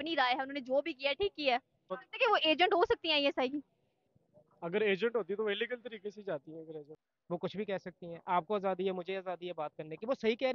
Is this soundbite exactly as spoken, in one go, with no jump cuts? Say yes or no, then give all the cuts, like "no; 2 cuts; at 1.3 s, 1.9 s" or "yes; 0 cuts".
no; 2 cuts; at 1.8 s, 7.0 s